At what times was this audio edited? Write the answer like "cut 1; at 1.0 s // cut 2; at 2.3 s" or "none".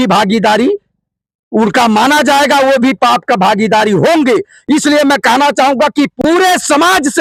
none